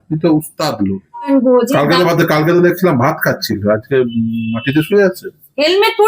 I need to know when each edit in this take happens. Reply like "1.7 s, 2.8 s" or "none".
1.3 s

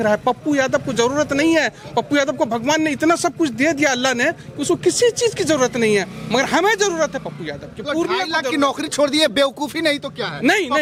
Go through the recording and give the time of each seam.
none

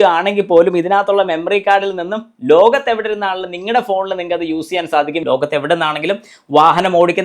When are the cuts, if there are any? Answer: 5.2 s

